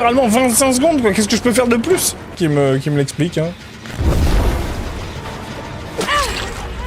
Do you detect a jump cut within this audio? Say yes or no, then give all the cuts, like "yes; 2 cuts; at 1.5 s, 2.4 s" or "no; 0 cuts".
yes; 1 cut; at 2.4 s